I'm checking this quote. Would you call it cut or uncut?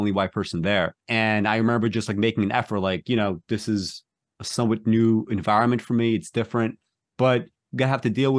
cut